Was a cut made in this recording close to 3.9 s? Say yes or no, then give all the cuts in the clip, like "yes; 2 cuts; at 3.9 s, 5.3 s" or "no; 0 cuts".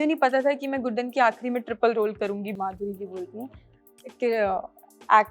no; 1 cut; at 2.5 s